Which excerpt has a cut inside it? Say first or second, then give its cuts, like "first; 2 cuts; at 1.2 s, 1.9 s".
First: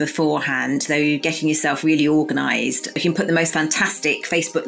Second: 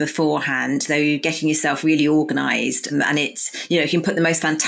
first; 1 cut; at 2.9 s